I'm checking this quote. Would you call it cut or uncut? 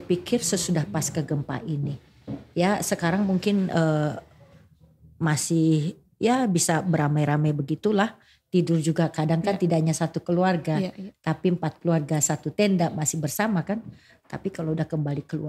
uncut